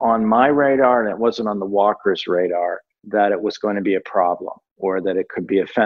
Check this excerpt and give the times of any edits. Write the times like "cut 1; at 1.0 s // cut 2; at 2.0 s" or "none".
none